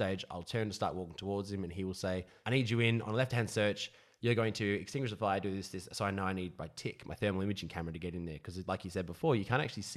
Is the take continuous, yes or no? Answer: no